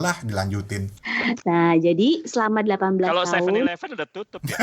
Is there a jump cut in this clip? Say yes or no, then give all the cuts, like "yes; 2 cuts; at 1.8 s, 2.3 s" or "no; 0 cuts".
yes; 1 cut; at 1.0 s